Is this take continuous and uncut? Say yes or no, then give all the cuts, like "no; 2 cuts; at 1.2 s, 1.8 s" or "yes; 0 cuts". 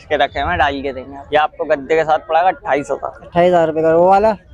no; 1 cut; at 1.1 s